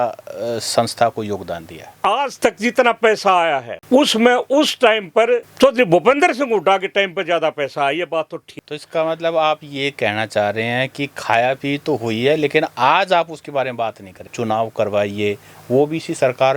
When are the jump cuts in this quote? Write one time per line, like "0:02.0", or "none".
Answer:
0:01.9
0:08.6
0:14.3